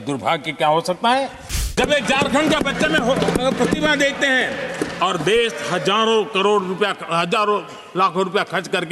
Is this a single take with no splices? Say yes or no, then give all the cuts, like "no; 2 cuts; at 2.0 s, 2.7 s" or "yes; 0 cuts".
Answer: no; 1 cut; at 1.7 s